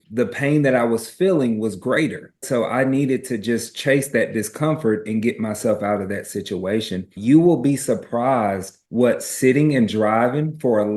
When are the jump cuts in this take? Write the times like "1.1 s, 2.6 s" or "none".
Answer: 7.1 s